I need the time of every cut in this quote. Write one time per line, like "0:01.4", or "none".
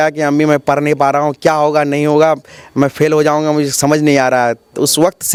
none